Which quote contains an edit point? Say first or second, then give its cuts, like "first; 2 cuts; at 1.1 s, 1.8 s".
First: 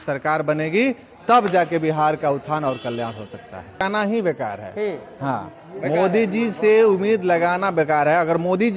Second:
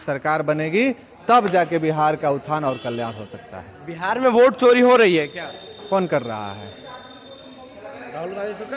first; 1 cut; at 3.8 s